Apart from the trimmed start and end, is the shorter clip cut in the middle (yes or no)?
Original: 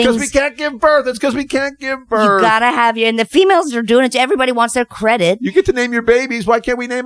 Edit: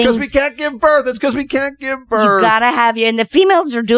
no